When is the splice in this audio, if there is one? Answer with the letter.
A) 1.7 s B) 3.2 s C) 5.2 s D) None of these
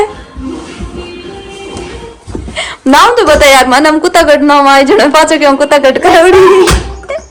D